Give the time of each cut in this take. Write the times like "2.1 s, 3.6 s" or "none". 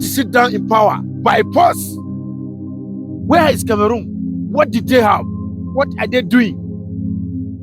1.8 s, 3.3 s